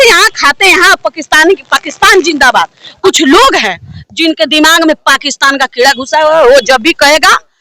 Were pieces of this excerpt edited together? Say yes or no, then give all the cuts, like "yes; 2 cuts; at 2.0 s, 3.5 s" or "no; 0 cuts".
yes; 1 cut; at 2.9 s